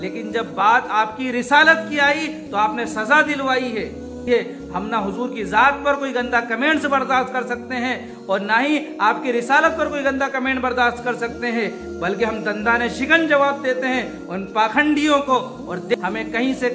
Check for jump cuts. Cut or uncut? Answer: cut